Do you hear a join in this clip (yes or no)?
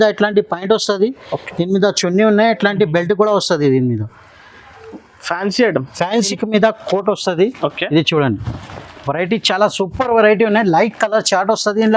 yes